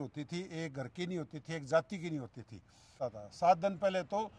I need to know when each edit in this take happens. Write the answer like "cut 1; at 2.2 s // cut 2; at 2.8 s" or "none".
cut 1; at 3.0 s